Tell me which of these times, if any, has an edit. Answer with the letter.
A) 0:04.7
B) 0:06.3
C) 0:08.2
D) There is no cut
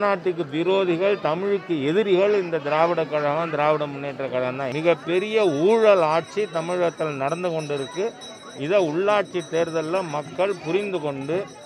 A